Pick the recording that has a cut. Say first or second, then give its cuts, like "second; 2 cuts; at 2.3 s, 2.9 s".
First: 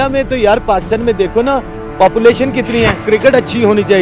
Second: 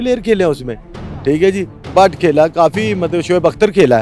first; 1 cut; at 3.0 s